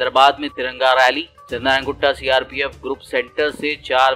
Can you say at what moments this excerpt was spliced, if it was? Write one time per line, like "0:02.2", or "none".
none